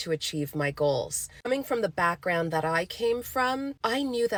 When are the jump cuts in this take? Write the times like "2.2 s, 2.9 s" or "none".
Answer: none